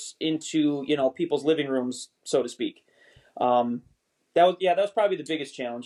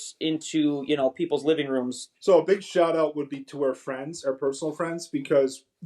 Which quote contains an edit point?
second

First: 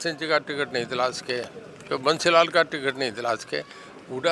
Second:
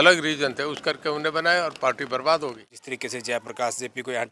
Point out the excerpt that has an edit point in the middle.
second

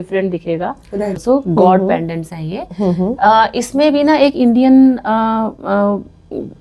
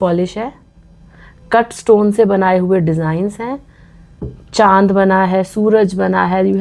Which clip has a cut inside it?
first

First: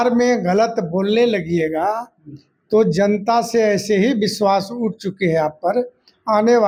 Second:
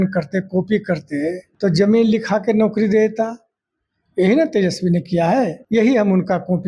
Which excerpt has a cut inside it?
second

